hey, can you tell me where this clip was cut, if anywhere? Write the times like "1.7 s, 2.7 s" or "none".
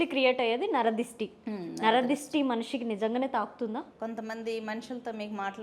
3.9 s